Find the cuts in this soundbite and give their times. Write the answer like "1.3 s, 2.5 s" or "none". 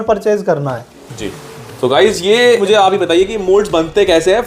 2.6 s